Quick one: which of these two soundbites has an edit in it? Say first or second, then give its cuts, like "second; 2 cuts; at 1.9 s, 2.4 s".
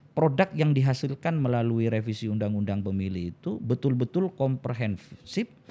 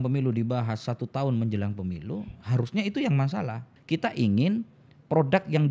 second; 1 cut; at 3.7 s